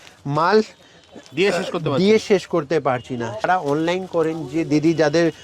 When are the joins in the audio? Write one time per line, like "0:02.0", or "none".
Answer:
0:03.5